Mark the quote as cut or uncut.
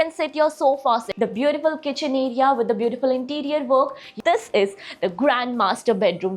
cut